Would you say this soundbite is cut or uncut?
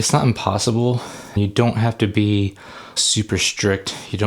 cut